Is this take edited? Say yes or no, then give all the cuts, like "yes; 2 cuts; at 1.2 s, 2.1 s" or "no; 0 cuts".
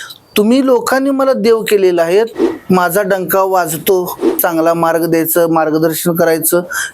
yes; 2 cuts; at 2.3 s, 4.4 s